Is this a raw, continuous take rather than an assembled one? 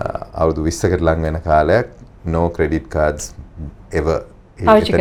yes; 0 cuts

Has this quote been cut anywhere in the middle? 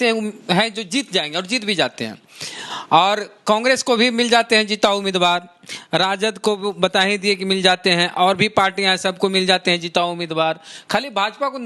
no; 0 cuts

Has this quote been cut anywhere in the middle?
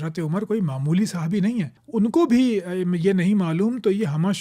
yes; 1 cut; at 1.8 s

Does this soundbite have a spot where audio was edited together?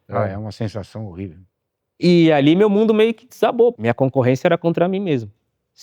yes; 1 cut; at 3.8 s

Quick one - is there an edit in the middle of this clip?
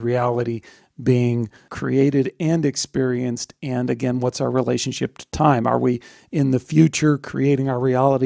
no; 0 cuts

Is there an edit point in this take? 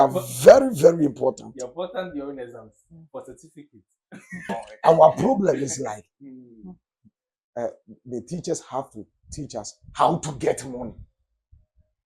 yes; 1 cut; at 4.6 s

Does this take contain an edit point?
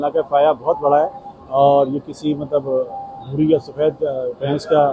no; 0 cuts

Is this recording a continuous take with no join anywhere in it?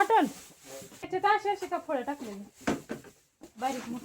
no; 1 cut; at 1.0 s

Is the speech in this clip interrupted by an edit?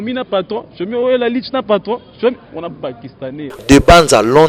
yes; 1 cut; at 3.6 s

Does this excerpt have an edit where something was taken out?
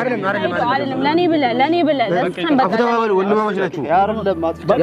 no; 0 cuts

